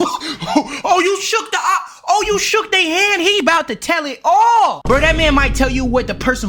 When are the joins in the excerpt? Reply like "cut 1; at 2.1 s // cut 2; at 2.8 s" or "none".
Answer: cut 1; at 4.8 s